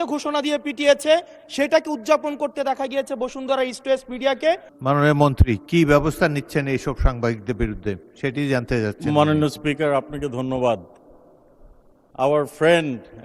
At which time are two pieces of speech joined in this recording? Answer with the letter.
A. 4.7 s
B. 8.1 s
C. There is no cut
A